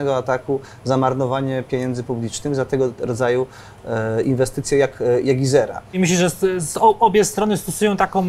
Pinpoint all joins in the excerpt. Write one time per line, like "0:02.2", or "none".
0:06.0